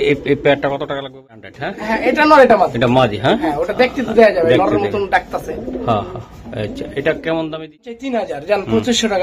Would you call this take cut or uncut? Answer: cut